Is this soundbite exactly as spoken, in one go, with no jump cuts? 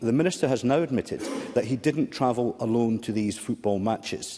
yes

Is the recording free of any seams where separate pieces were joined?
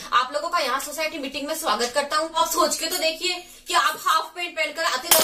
no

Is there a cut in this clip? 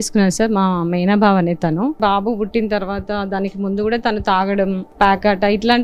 yes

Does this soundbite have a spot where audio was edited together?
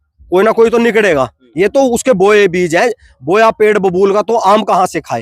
yes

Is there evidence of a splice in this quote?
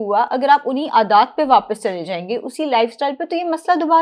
no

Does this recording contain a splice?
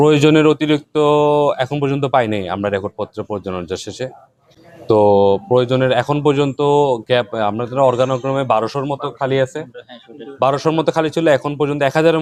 no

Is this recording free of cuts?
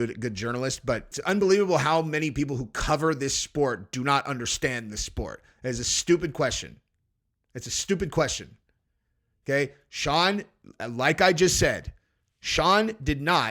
no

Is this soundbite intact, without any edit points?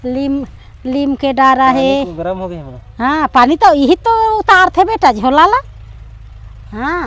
yes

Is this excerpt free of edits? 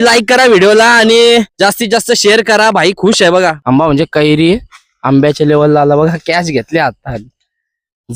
no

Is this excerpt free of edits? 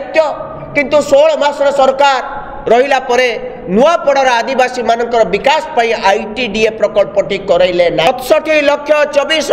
no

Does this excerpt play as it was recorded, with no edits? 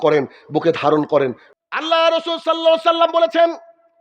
no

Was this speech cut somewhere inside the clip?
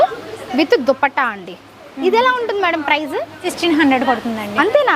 yes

